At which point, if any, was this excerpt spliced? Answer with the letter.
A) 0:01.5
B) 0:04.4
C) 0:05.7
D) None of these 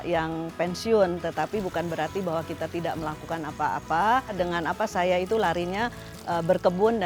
B